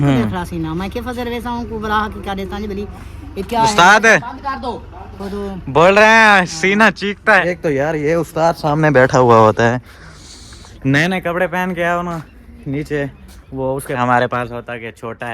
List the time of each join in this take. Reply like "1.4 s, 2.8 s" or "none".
7.4 s, 14.0 s